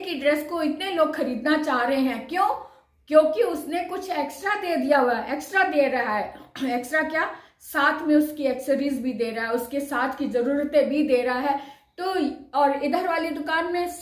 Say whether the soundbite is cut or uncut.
uncut